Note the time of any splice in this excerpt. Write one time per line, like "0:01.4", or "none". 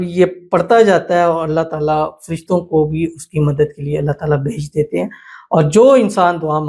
none